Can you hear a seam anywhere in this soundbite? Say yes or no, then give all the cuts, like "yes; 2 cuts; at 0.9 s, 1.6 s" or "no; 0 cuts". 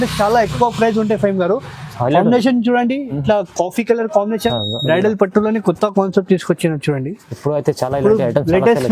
yes; 1 cut; at 4.6 s